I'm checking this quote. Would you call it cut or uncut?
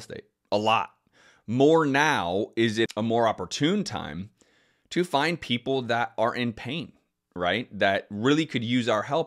uncut